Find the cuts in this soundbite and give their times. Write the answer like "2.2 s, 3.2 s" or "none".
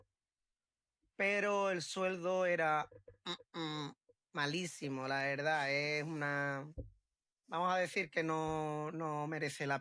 none